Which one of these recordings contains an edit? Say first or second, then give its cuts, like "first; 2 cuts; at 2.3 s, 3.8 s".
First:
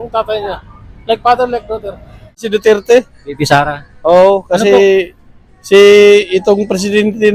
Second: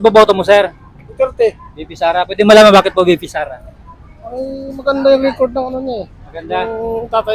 first; 1 cut; at 2.4 s